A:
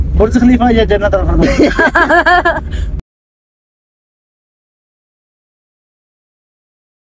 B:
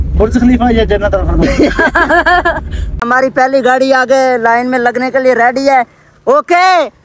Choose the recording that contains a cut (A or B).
B